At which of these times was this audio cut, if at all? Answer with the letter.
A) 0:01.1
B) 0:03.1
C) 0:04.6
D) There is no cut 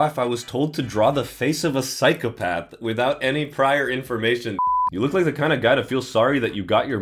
C